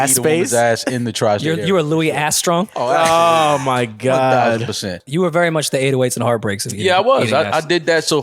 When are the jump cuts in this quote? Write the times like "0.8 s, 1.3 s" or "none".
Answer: 5.0 s

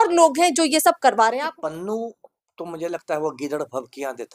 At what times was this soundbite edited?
1.4 s

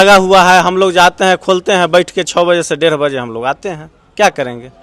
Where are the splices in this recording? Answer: none

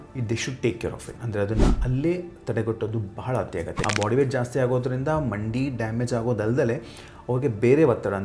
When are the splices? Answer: 3.7 s

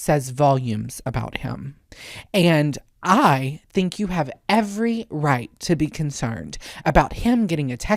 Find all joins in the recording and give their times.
none

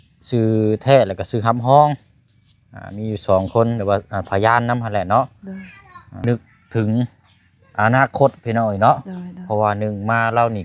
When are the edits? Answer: 6.1 s

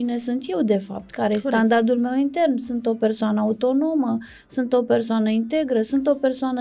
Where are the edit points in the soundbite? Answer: none

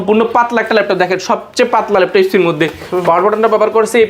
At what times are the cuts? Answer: none

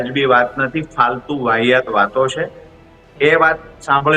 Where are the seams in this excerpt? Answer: none

